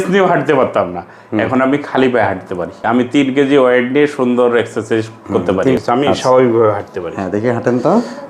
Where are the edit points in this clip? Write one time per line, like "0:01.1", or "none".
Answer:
0:02.8
0:05.8